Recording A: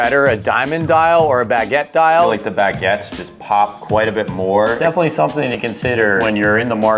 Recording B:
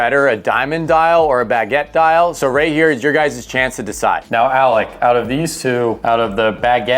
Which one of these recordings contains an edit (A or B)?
A